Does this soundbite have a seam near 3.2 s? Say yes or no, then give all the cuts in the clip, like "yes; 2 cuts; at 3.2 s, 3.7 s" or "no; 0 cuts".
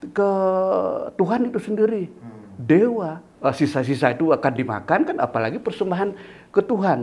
yes; 1 cut; at 3.2 s